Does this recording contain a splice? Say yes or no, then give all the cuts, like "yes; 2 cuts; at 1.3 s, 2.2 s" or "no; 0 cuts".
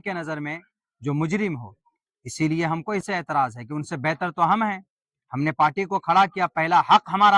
yes; 1 cut; at 3.0 s